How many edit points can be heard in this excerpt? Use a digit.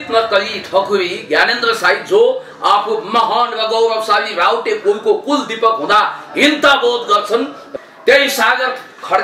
1